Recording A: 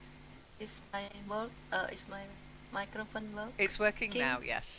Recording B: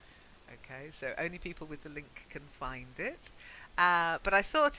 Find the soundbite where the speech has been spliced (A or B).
A